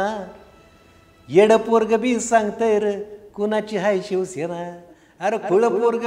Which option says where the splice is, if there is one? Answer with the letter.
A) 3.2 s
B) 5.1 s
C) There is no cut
C